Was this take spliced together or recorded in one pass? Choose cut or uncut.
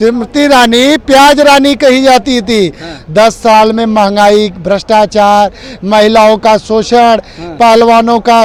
uncut